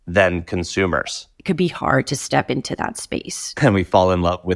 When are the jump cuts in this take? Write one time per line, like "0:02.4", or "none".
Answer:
0:01.4
0:03.5